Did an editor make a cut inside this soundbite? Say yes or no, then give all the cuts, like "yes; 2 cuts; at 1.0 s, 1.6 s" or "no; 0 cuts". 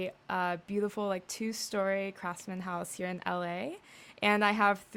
no; 0 cuts